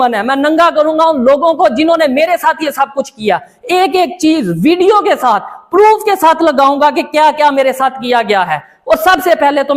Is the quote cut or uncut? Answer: uncut